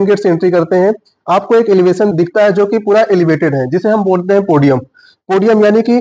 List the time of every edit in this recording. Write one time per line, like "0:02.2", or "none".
none